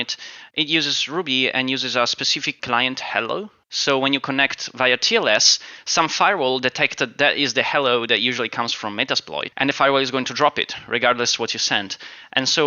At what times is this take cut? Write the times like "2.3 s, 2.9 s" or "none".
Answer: 2.5 s, 3.6 s, 9.4 s